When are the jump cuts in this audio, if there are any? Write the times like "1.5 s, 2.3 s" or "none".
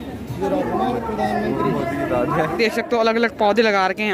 none